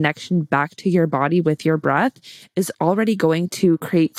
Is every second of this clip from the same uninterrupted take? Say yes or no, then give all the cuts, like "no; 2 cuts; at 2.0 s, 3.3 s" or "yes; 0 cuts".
no; 1 cut; at 2.7 s